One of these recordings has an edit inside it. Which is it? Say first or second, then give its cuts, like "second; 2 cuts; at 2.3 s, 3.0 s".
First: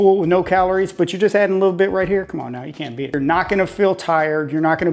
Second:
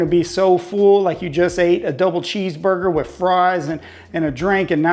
first; 1 cut; at 3.1 s